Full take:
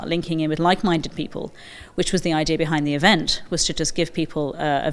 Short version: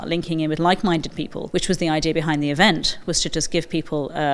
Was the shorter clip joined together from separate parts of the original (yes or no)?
yes